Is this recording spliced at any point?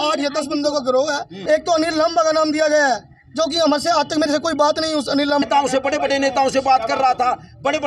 yes; 2 cuts; at 1.3 s, 5.4 s

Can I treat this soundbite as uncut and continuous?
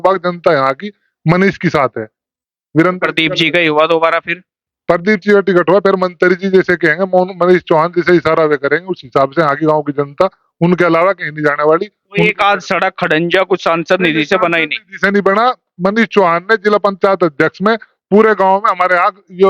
yes; 0 cuts

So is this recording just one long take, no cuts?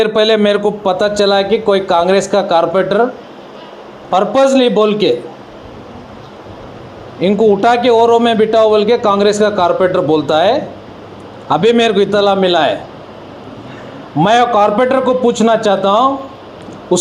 yes; 0 cuts

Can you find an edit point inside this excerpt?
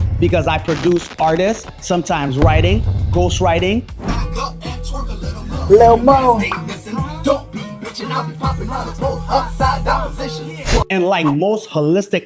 yes; 1 cut; at 10.9 s

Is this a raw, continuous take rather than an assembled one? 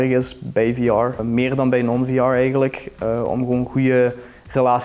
no; 1 cut; at 1.2 s

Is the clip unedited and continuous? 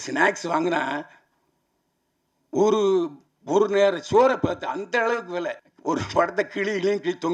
no; 1 cut; at 5.6 s

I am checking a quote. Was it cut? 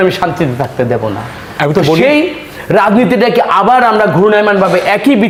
no; 0 cuts

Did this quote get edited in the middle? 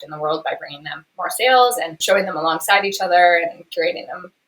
yes; 1 cut; at 2.0 s

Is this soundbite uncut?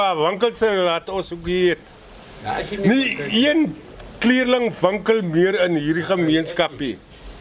yes; 0 cuts

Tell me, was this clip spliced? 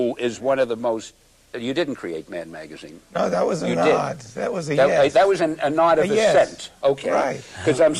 no; 0 cuts

